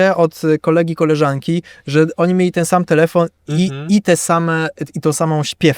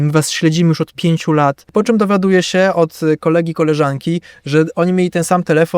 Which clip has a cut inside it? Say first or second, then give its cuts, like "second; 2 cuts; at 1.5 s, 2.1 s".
second; 1 cut; at 1.7 s